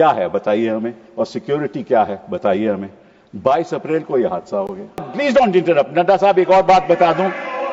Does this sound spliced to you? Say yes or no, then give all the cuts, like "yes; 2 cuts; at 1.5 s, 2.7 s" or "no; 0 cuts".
yes; 1 cut; at 5.1 s